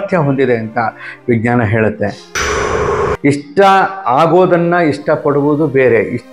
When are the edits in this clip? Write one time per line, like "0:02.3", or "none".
0:02.8